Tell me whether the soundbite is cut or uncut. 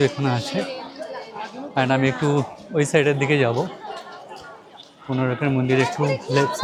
uncut